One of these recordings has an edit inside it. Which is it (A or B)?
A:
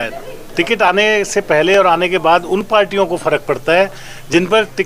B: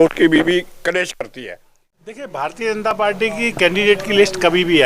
B